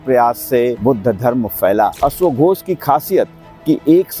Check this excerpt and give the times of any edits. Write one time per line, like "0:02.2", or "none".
0:00.8
0:01.9